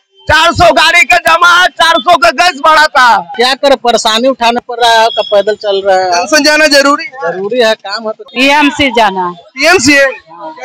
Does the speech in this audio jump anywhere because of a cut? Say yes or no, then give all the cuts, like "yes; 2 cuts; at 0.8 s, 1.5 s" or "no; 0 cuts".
yes; 2 cuts; at 3.3 s, 8.2 s